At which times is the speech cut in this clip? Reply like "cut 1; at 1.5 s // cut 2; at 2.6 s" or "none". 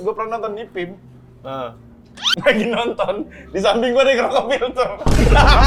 none